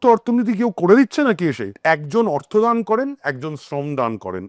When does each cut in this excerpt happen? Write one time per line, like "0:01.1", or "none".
0:01.7